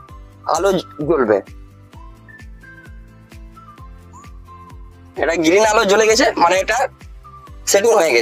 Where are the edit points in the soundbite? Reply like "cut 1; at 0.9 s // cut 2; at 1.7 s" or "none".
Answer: none